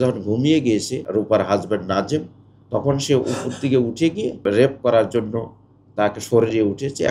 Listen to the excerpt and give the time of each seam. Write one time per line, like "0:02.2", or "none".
0:01.0
0:04.8